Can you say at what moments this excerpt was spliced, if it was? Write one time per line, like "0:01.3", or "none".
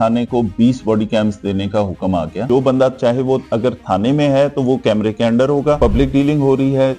0:02.4
0:05.8